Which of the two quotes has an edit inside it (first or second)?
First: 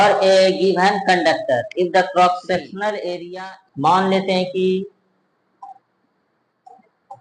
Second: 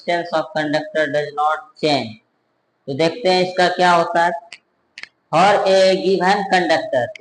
first